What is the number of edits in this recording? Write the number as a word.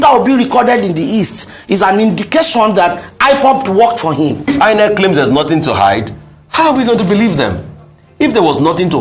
one